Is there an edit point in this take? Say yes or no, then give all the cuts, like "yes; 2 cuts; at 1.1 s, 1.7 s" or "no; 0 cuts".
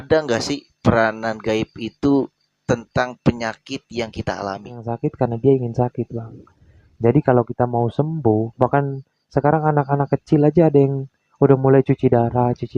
yes; 1 cut; at 4.9 s